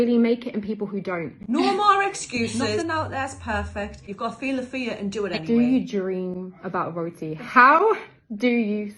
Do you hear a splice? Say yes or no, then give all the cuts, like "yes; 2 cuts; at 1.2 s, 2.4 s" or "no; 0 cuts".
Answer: yes; 4 cuts; at 1.3 s, 2.7 s, 4.0 s, 5.4 s